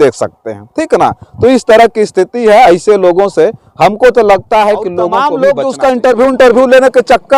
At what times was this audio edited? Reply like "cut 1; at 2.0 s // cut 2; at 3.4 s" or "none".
cut 1; at 5.1 s